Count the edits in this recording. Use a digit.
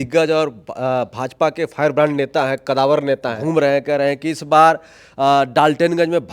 1